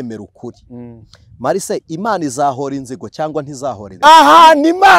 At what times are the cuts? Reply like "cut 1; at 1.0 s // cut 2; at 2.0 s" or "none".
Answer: cut 1; at 4.0 s